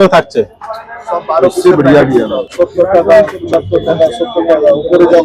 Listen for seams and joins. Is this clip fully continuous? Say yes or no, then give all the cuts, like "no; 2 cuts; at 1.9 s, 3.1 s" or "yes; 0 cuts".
no; 1 cut; at 2.4 s